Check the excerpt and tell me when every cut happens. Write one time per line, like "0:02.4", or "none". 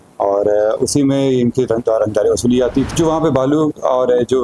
0:02.9